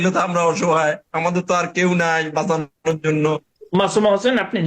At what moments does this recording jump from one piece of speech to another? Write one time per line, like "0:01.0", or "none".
none